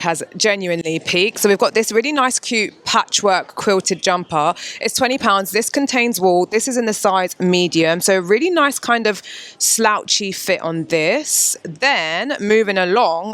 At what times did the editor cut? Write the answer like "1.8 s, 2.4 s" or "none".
none